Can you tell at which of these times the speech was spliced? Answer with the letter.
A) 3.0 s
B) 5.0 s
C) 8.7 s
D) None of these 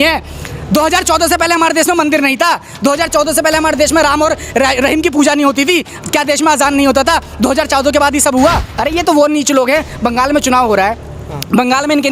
C